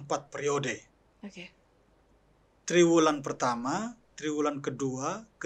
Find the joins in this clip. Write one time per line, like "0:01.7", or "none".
none